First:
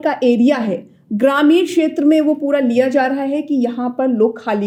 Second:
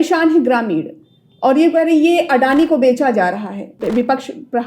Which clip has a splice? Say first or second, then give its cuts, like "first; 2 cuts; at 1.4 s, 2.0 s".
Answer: second; 1 cut; at 3.7 s